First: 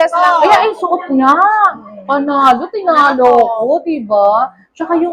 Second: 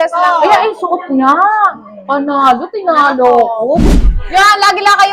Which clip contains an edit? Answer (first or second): second